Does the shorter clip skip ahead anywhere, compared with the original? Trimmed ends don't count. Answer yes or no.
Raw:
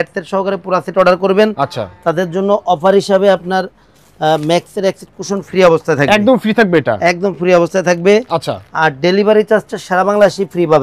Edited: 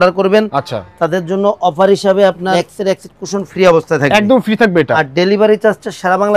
yes